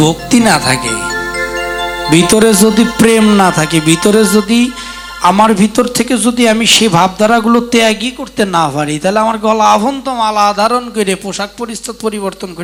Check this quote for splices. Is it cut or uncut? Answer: uncut